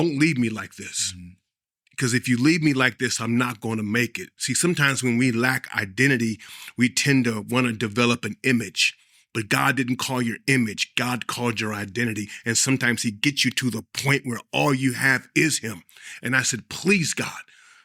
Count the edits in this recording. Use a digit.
0